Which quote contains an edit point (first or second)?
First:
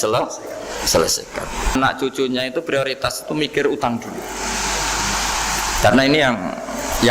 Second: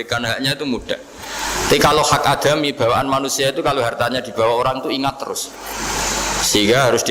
first